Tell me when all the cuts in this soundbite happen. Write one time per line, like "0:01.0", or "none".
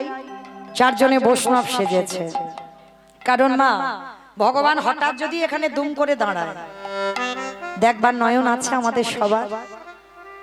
none